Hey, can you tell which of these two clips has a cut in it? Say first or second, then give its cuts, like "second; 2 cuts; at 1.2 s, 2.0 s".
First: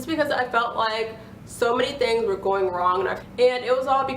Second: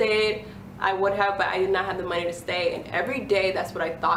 first; 1 cut; at 3.2 s